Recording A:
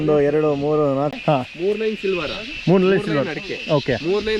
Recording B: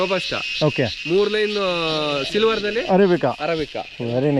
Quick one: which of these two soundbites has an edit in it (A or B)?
A